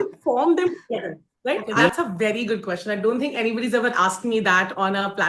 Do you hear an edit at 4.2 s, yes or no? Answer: no